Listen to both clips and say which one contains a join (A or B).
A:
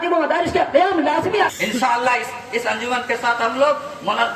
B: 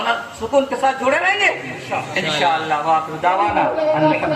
A